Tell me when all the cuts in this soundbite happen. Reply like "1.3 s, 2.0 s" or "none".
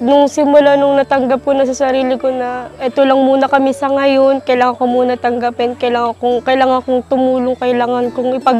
2.8 s